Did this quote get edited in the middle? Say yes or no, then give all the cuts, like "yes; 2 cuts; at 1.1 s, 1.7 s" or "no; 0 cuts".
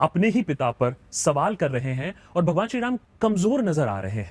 yes; 1 cut; at 3.1 s